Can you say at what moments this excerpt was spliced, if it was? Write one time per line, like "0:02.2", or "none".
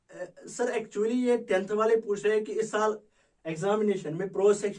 none

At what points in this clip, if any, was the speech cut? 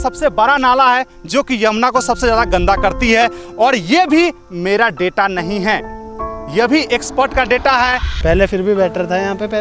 0:08.1

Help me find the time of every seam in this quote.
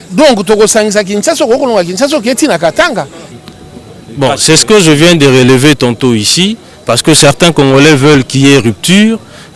0:03.2

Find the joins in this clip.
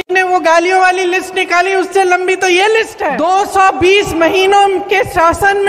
0:03.0

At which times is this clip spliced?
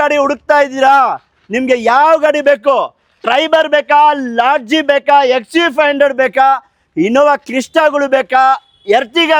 none

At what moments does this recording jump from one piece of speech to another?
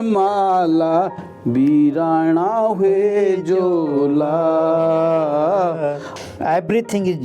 0:06.1

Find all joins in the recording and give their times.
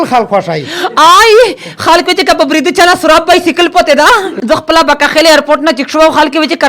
0:04.3

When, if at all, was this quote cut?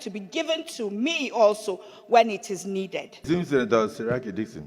0:03.1

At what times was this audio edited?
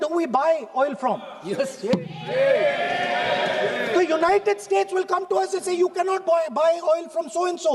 none

